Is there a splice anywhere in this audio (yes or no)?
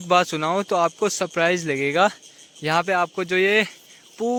no